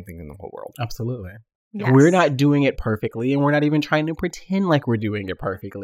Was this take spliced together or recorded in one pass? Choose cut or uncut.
cut